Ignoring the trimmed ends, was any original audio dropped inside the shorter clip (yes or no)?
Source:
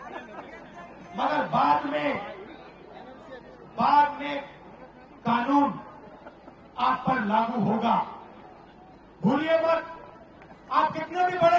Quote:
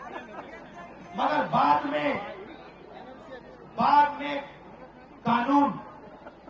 no